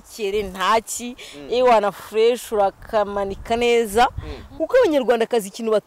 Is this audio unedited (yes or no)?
no